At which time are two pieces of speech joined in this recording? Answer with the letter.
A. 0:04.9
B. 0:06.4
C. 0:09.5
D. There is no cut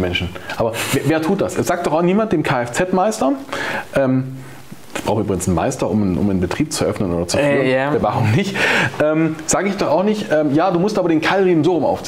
D